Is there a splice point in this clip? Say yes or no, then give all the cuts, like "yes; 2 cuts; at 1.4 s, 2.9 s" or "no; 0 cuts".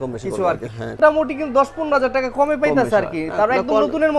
yes; 1 cut; at 1.0 s